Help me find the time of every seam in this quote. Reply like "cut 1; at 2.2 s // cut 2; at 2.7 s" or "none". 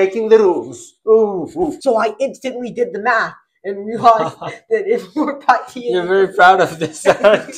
cut 1; at 1.7 s